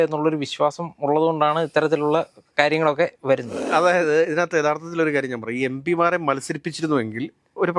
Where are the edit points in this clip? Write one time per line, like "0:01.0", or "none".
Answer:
0:03.6